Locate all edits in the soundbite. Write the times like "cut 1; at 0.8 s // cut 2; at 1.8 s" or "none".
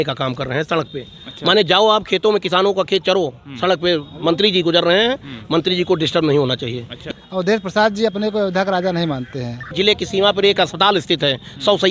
cut 1; at 7.0 s // cut 2; at 9.7 s